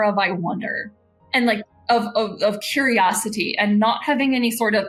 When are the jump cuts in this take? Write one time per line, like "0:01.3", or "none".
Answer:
none